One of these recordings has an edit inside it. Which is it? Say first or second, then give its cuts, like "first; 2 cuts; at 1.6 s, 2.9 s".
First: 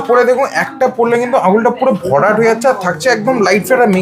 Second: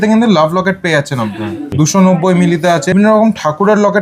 second; 2 cuts; at 1.7 s, 2.9 s